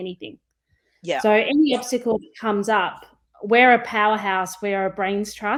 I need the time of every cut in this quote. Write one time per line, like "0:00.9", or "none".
none